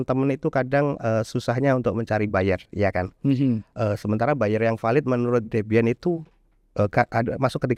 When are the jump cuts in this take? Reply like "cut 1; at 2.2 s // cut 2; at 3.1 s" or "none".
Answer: none